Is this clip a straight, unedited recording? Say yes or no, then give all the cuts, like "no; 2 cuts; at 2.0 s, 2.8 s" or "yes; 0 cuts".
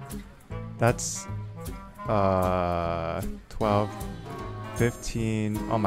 yes; 0 cuts